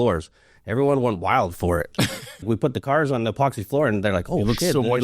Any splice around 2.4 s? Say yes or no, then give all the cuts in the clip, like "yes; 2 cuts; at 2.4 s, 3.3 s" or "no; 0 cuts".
yes; 1 cut; at 2.4 s